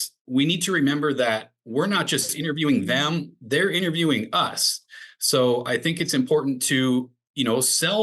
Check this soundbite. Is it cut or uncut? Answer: uncut